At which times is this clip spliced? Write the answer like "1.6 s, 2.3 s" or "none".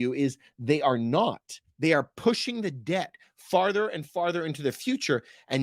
none